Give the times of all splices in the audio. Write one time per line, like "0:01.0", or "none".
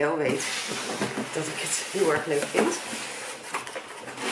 none